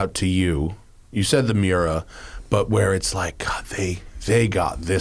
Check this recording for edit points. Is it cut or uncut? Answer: uncut